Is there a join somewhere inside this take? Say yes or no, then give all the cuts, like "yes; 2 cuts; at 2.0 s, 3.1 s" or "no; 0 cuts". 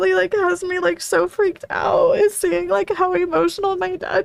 no; 0 cuts